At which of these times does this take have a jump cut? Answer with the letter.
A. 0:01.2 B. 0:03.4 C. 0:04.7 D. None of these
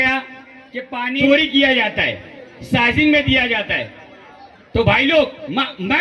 A